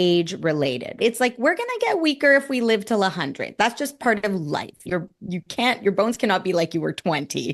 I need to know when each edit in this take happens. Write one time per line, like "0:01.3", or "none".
0:01.0
0:04.8